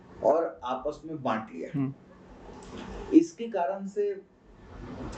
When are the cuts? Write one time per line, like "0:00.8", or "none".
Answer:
none